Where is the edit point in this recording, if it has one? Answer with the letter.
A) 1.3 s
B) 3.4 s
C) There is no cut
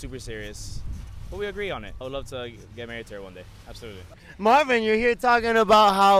C